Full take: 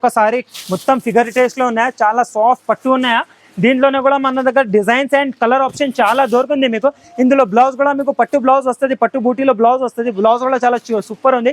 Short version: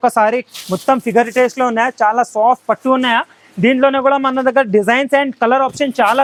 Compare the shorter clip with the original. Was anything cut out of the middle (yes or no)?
no